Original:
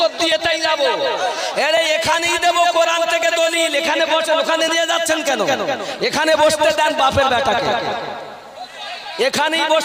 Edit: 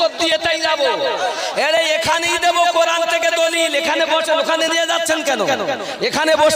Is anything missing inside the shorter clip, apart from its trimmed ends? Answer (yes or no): no